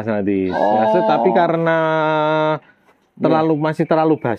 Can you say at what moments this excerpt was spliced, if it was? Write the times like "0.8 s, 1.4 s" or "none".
none